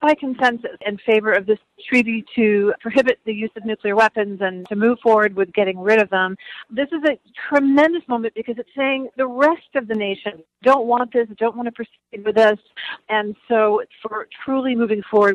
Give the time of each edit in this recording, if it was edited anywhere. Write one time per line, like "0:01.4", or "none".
0:00.9
0:04.6
0:06.6